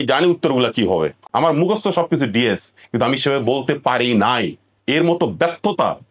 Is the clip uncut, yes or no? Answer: no